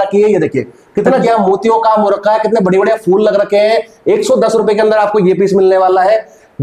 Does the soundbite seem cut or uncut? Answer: cut